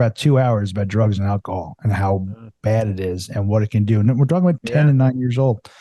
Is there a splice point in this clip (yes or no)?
yes